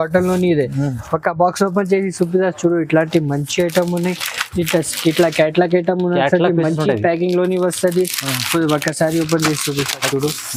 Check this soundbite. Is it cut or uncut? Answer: uncut